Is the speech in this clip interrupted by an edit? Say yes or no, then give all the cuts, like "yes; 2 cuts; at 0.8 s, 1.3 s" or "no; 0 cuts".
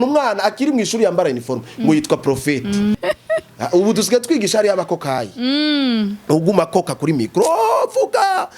yes; 1 cut; at 2.9 s